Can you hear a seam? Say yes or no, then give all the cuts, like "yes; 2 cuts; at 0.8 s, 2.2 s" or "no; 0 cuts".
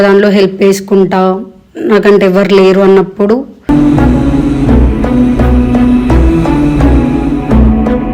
no; 0 cuts